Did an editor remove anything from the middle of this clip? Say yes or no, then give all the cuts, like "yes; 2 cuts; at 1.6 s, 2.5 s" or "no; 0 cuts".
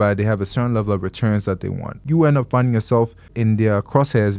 yes; 2 cuts; at 2.0 s, 3.3 s